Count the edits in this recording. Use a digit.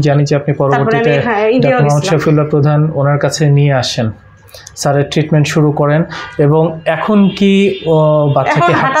0